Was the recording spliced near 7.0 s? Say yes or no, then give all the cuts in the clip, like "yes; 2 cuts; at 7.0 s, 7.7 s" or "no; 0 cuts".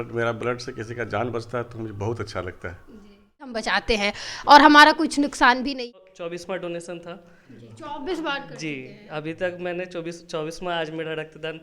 no; 2 cuts; at 3.6 s, 5.7 s